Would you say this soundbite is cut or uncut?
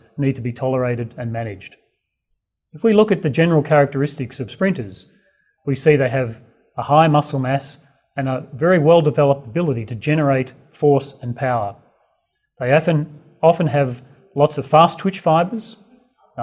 cut